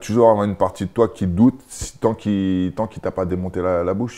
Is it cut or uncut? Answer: uncut